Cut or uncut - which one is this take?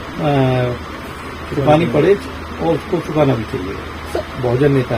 cut